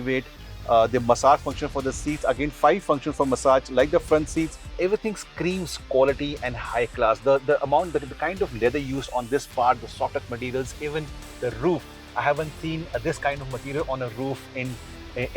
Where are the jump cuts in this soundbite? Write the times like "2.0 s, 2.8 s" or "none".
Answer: 4.8 s

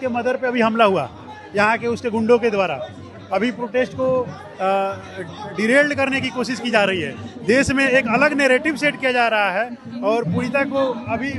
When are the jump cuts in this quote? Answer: none

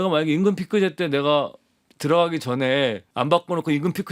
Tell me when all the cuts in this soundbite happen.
3.0 s

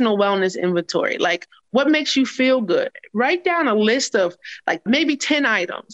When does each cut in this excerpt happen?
1.6 s, 4.8 s

